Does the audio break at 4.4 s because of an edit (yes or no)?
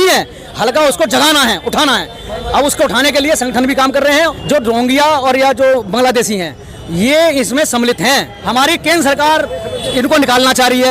yes